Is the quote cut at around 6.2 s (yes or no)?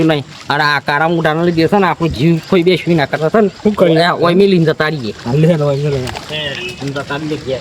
yes